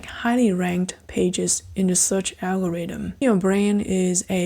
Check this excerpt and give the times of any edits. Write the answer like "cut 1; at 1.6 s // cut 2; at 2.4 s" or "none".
cut 1; at 3.2 s